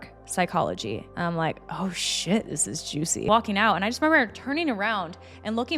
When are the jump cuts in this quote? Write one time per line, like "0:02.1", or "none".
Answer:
0:03.2